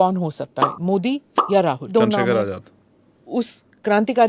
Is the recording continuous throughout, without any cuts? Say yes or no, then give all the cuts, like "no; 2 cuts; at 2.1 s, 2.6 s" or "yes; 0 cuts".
no; 2 cuts; at 1.9 s, 3.3 s